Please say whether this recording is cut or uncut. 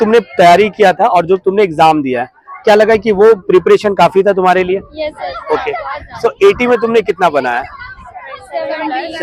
uncut